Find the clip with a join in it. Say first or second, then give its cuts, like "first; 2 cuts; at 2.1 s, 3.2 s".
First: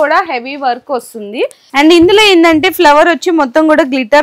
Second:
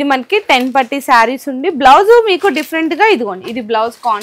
first; 1 cut; at 1.7 s